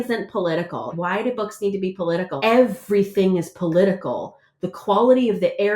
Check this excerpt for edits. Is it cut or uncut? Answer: cut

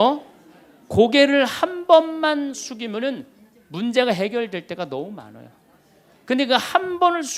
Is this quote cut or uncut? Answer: uncut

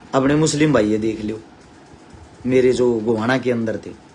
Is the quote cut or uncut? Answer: uncut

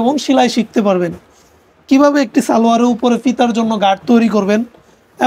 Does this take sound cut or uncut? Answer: uncut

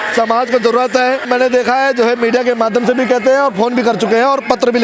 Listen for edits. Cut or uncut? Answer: cut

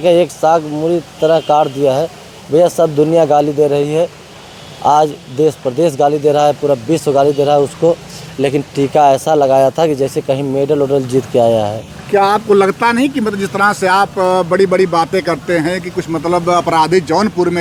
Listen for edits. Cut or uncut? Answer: uncut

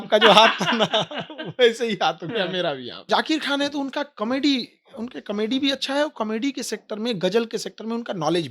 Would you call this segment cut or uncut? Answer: cut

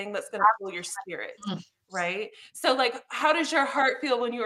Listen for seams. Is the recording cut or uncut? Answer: uncut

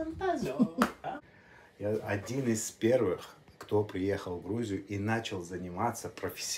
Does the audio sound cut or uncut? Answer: cut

